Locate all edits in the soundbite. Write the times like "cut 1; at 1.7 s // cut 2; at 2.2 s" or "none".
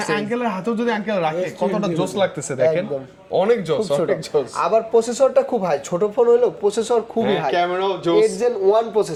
none